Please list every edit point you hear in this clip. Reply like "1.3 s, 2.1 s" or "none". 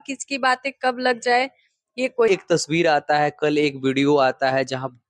2.3 s